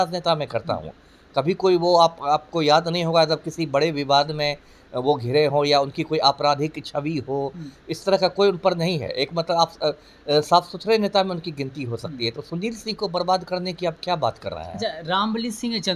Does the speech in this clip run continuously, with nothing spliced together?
yes; 0 cuts

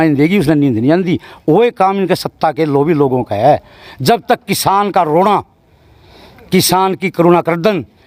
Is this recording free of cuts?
yes; 0 cuts

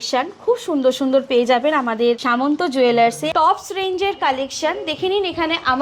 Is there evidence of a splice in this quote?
yes; 2 cuts; at 2.2 s, 3.2 s

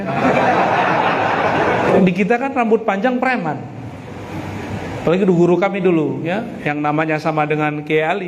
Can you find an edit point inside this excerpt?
yes; 1 cut; at 1.9 s

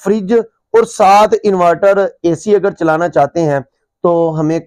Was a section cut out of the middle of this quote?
no; 0 cuts

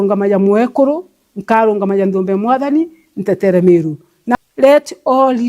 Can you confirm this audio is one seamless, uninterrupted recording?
no; 1 cut; at 4.3 s

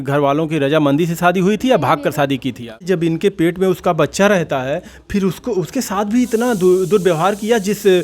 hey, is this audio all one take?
no; 1 cut; at 2.8 s

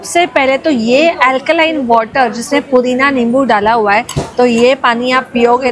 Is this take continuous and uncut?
yes; 0 cuts

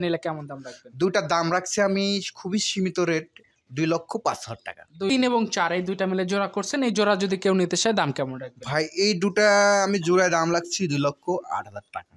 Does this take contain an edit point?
yes; 1 cut; at 5.1 s

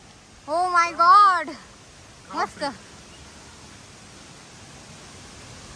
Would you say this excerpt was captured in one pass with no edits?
yes; 0 cuts

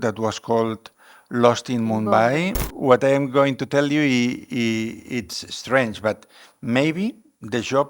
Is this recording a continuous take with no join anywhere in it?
no; 1 cut; at 2.6 s

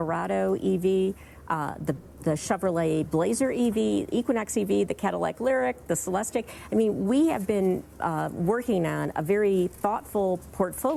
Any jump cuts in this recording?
no; 0 cuts

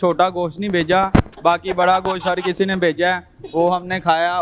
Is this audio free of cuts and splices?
yes; 0 cuts

